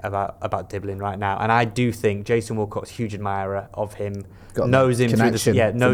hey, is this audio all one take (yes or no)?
yes